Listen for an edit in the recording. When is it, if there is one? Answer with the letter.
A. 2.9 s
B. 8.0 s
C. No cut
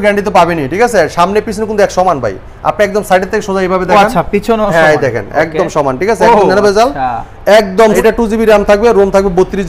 B